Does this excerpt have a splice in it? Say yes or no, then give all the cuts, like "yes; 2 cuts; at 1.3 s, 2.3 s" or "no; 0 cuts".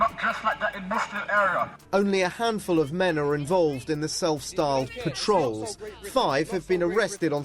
no; 0 cuts